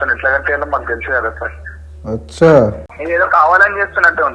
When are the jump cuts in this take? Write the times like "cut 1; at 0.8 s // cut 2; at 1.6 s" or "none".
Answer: cut 1; at 2.8 s

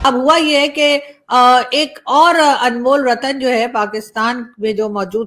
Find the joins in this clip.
none

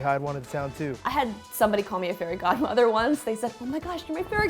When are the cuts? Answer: cut 1; at 1.0 s

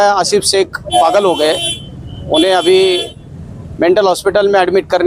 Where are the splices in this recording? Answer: none

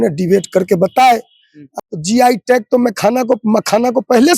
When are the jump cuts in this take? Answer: cut 1; at 1.7 s

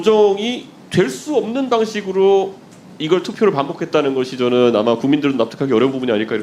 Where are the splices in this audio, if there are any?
none

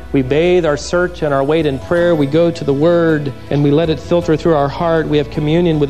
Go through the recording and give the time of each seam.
cut 1; at 3.4 s

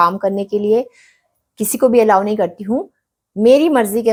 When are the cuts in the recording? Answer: none

